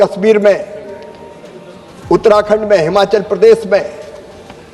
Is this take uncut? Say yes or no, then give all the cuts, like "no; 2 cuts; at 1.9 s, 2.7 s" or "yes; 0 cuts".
yes; 0 cuts